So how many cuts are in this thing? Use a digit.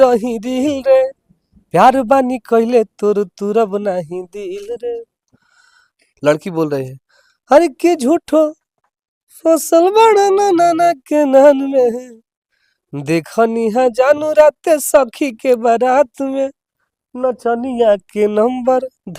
0